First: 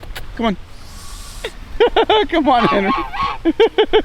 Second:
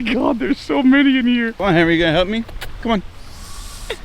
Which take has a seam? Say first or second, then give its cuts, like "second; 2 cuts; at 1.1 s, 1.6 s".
second; 1 cut; at 1.5 s